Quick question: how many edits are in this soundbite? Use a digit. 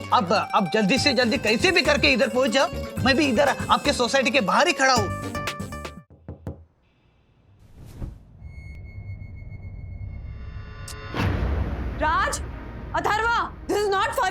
1